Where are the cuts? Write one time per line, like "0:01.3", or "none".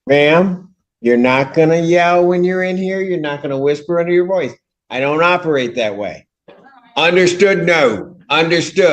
0:07.6